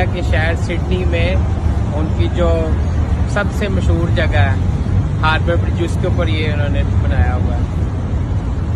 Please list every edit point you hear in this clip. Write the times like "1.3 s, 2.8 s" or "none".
none